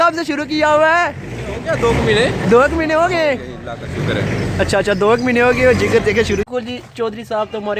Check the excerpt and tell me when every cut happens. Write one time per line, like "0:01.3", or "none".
0:06.5